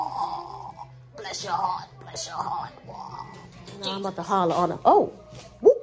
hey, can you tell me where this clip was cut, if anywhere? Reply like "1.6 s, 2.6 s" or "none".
4.0 s